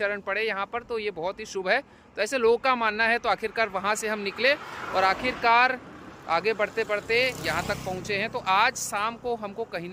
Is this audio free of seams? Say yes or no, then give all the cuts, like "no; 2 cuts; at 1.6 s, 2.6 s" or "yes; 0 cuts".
yes; 0 cuts